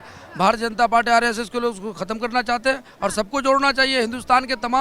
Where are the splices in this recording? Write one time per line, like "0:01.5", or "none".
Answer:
none